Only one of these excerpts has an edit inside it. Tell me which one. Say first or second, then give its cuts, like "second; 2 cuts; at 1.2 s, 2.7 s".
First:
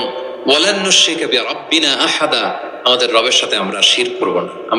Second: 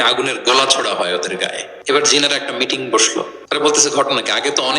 second; 2 cuts; at 1.7 s, 3.4 s